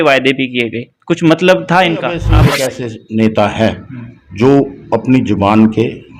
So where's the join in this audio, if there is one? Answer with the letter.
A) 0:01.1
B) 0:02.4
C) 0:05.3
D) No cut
B